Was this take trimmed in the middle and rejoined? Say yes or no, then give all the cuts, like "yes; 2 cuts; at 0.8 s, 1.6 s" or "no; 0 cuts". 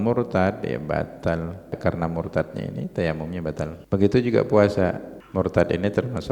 yes; 3 cuts; at 1.8 s, 3.8 s, 5.1 s